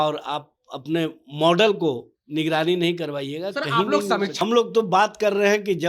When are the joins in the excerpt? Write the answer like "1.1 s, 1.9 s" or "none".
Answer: 4.4 s